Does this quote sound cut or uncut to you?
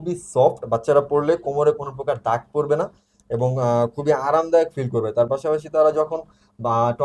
uncut